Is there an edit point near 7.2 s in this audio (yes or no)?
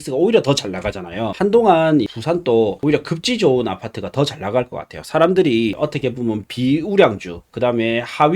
no